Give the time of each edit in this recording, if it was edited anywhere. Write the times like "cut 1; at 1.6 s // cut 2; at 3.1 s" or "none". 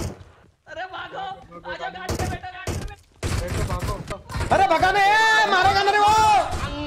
cut 1; at 4.1 s